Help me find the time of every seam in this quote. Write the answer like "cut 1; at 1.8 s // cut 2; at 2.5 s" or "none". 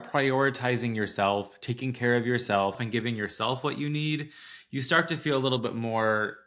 cut 1; at 2.8 s